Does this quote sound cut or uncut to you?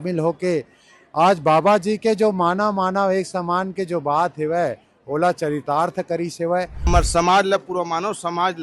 cut